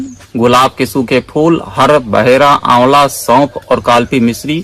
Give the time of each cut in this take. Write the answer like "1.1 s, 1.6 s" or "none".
none